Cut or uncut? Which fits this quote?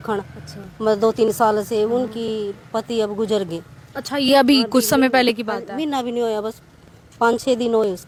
uncut